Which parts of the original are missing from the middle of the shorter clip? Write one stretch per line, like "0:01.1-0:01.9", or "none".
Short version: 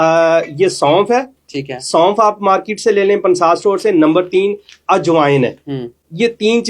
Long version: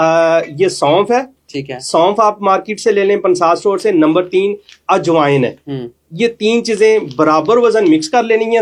none

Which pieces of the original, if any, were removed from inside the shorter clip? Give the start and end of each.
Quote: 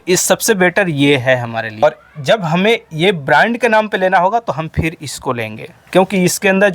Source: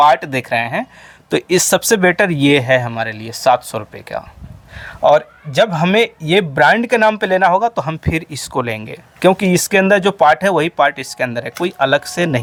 0:03.2-0:05.1

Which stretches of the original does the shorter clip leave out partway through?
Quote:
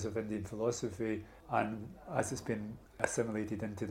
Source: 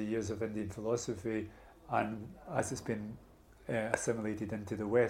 0:01.6-0:01.7
0:03.4-0:03.9

